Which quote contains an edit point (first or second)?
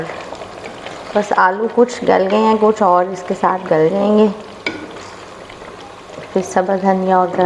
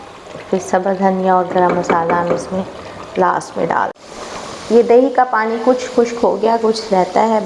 second